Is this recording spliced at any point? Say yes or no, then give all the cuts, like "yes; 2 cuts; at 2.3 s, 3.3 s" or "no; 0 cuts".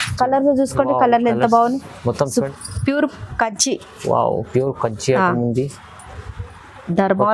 yes; 1 cut; at 2.5 s